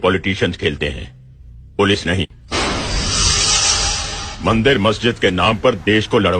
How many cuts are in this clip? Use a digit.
0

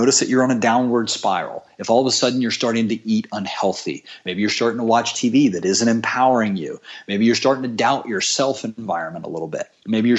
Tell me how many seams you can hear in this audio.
0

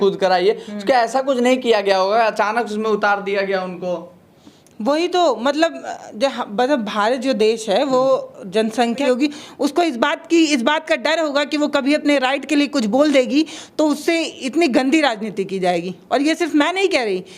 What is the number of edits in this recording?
1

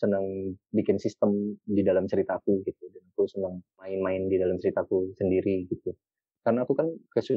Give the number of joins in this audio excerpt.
1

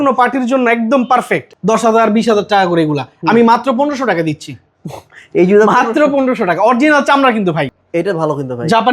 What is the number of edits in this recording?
2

